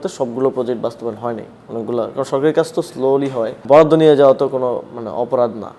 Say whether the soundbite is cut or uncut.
cut